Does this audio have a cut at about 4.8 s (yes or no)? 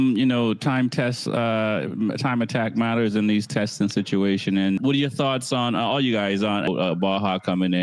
yes